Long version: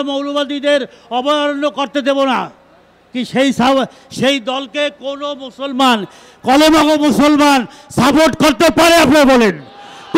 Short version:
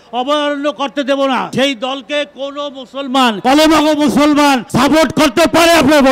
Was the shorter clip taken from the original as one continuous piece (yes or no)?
no